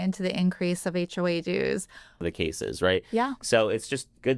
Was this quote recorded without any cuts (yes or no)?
no